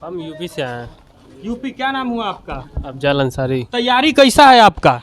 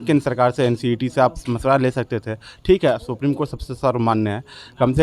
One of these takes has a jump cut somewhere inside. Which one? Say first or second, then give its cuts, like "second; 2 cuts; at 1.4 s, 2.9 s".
first; 1 cut; at 3.7 s